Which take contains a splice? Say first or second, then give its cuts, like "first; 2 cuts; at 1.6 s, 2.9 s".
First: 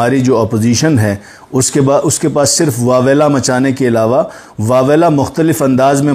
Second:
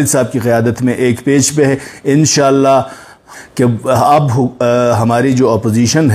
second; 1 cut; at 3.3 s